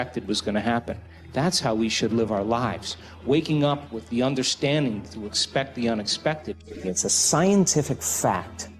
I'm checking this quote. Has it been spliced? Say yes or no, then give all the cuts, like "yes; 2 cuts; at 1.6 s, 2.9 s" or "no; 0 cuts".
yes; 1 cut; at 6.7 s